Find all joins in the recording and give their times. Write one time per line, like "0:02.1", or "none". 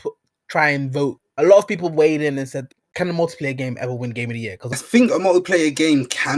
0:01.2
0:02.6
0:04.8